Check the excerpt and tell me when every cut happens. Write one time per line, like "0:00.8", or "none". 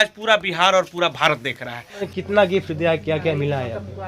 0:02.1